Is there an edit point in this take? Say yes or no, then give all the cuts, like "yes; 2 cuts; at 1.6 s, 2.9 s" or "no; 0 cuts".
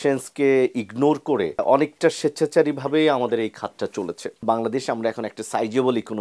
yes; 2 cuts; at 1.6 s, 4.4 s